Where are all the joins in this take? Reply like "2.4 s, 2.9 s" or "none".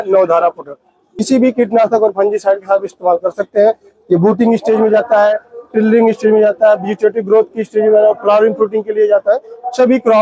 1.2 s